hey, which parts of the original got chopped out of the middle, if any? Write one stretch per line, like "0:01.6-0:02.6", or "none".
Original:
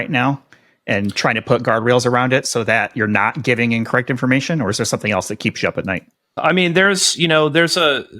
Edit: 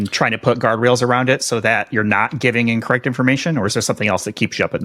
none